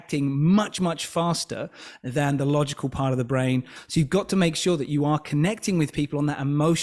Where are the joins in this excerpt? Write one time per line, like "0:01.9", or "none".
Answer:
0:03.8